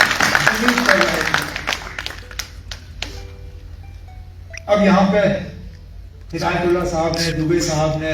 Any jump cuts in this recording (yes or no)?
no